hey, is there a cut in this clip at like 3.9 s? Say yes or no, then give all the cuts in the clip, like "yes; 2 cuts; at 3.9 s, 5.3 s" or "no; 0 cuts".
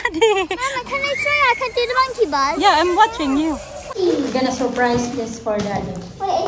yes; 1 cut; at 3.9 s